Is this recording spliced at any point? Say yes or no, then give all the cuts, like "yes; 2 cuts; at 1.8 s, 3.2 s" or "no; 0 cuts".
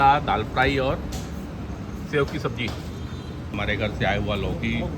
yes; 1 cut; at 3.5 s